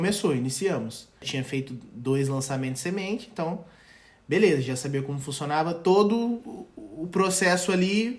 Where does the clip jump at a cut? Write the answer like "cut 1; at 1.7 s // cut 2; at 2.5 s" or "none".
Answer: cut 1; at 1.3 s